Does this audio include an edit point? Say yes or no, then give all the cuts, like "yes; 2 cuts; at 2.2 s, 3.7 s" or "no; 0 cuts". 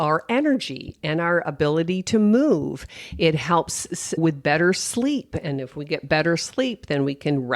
yes; 1 cut; at 4.2 s